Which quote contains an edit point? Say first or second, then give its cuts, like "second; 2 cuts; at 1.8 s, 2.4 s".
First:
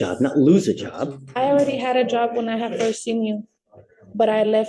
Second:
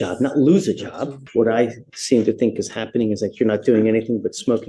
second; 1 cut; at 1.2 s